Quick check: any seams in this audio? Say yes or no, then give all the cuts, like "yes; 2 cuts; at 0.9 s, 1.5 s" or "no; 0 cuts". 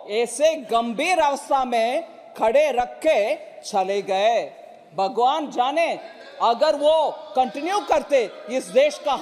no; 0 cuts